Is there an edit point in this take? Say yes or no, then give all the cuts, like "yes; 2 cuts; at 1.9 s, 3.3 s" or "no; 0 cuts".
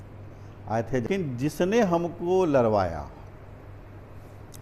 yes; 1 cut; at 1.1 s